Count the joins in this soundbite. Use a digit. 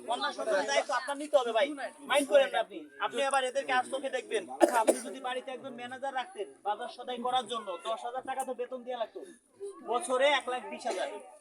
1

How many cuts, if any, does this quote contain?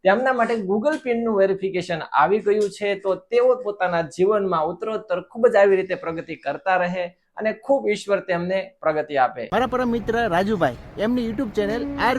0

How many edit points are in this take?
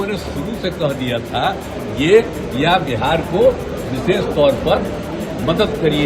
0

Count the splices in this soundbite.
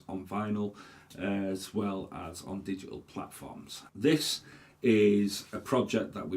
1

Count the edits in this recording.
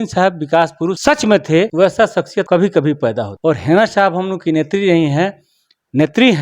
3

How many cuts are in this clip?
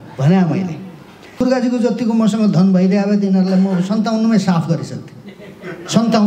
1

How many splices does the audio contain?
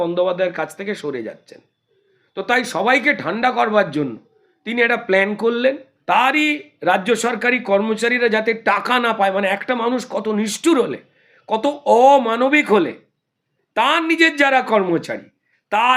1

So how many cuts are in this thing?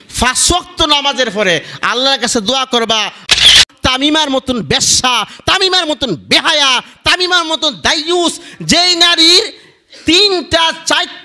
1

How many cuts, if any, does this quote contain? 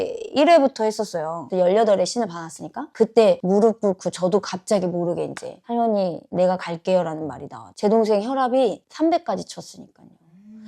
2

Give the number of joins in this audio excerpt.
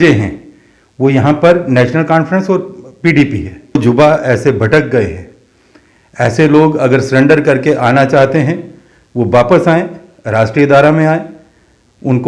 1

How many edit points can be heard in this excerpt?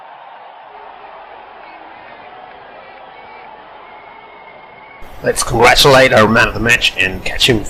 0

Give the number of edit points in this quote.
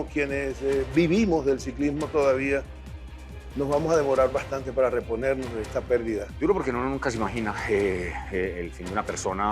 1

